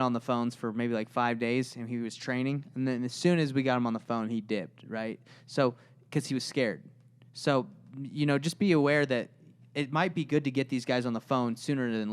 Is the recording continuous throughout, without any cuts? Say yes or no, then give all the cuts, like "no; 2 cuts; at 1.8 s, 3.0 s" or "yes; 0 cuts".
yes; 0 cuts